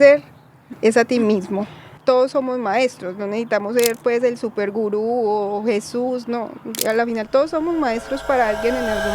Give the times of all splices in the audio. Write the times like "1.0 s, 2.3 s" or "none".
1.8 s